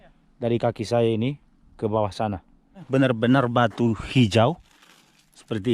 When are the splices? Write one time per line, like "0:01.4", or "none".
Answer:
0:02.9